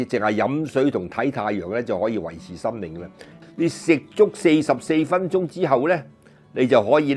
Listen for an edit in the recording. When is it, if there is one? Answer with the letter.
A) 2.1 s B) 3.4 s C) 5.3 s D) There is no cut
B